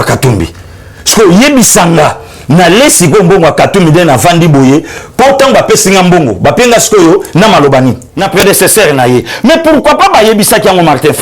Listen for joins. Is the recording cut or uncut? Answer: cut